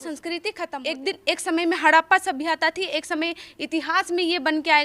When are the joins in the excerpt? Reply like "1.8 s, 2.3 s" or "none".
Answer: 0.9 s